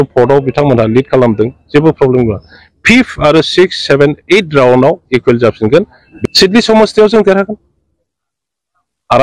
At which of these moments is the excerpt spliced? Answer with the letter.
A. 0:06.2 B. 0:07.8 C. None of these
A